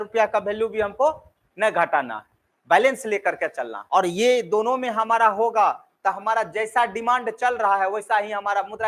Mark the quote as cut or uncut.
cut